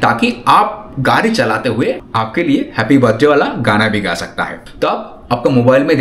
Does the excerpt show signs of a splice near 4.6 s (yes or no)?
yes